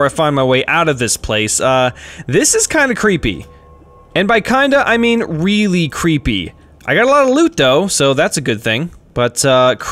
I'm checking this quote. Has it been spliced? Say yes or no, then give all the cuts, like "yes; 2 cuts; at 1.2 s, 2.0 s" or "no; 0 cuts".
yes; 1 cut; at 9.0 s